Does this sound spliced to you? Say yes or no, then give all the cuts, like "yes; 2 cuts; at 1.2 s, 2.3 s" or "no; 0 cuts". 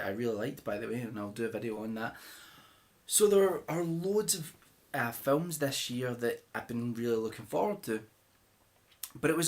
no; 0 cuts